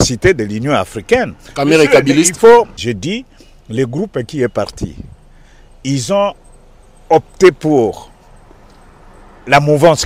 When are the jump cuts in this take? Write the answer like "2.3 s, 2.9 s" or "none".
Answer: 2.8 s